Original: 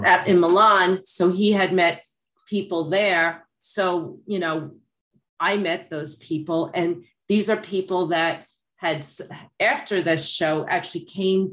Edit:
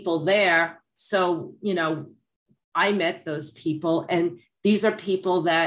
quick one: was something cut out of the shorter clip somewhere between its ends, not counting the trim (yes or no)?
no